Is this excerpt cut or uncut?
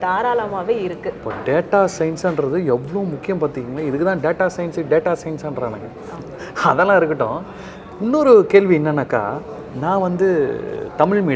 uncut